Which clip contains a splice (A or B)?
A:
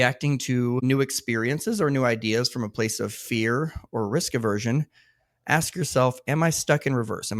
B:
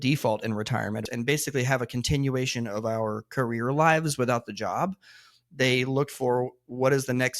B